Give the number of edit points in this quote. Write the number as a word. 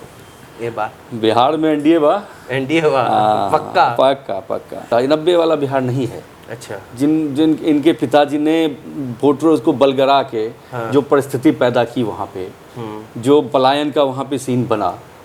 zero